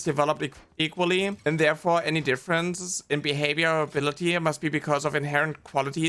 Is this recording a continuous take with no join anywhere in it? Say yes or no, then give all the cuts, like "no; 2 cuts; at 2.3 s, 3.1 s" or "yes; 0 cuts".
yes; 0 cuts